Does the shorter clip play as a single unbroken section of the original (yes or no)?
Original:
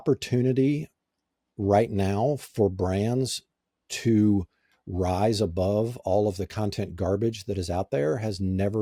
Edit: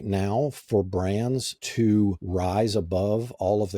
no